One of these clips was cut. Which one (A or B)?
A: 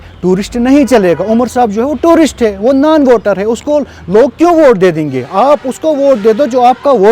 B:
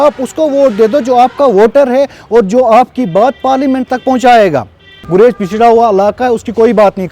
B